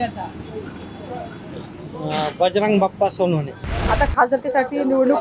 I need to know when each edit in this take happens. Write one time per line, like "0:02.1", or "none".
0:03.7